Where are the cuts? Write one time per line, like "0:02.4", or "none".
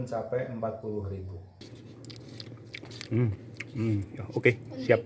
0:01.6